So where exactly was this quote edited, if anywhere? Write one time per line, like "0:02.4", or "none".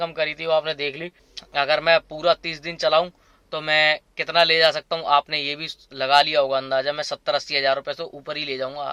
none